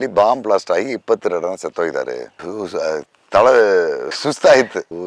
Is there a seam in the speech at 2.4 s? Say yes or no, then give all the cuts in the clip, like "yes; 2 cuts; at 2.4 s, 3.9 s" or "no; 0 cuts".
yes; 1 cut; at 2.4 s